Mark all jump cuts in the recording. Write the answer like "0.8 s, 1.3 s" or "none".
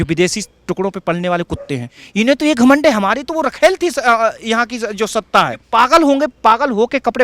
2.0 s, 5.6 s

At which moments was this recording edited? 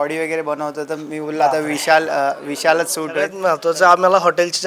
3.3 s

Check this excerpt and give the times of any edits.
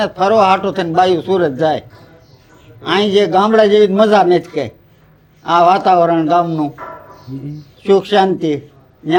none

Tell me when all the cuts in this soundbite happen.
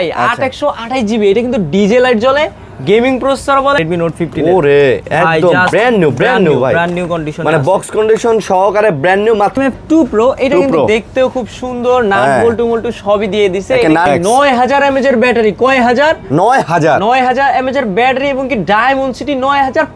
3.8 s, 9.5 s, 14.1 s

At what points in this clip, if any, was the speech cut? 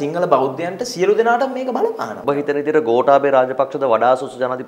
2.1 s

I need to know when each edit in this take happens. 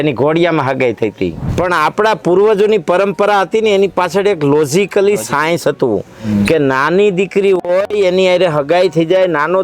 1.4 s

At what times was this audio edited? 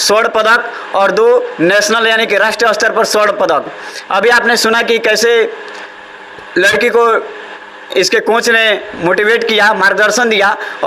none

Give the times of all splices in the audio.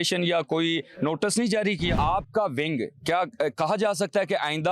2.0 s

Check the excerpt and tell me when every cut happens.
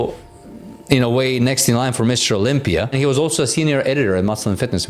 none

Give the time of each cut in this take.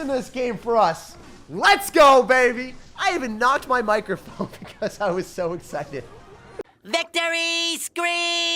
6.4 s

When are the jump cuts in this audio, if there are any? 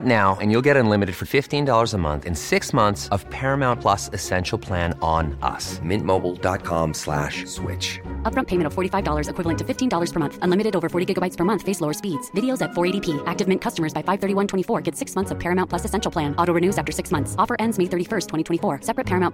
none

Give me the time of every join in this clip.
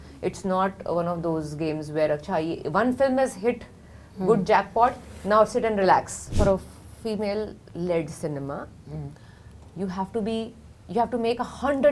6.2 s

